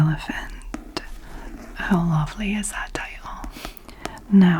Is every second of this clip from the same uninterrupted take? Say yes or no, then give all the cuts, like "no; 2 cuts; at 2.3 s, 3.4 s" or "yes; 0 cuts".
no; 1 cut; at 3.5 s